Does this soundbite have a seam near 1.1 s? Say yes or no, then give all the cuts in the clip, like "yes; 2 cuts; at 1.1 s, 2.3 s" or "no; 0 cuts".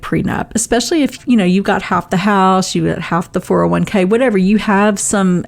yes; 1 cut; at 1.1 s